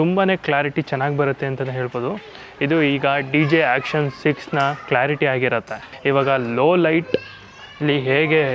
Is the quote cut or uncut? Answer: cut